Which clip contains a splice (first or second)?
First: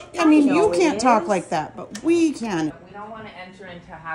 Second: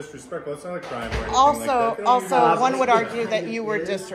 first